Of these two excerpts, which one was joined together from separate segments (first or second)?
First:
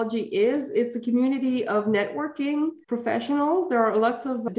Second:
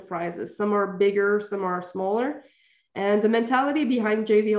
first